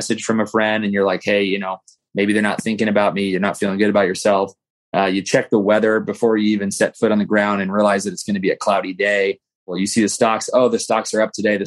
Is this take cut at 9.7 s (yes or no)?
yes